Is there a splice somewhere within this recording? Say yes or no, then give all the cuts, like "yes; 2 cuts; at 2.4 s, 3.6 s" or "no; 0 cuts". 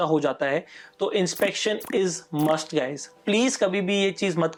no; 0 cuts